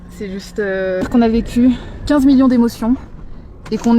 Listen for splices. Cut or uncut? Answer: cut